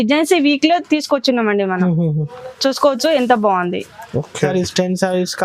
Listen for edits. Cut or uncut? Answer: cut